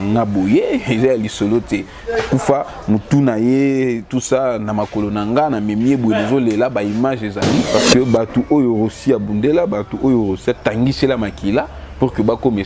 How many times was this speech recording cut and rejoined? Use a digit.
1